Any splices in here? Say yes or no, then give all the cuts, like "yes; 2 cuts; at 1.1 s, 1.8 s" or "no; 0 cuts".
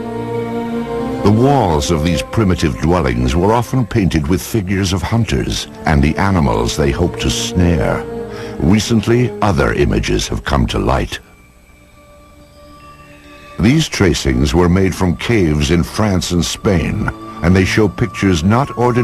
yes; 1 cut; at 8.1 s